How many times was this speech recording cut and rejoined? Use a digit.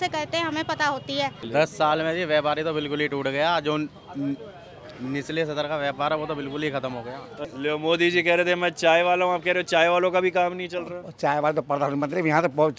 2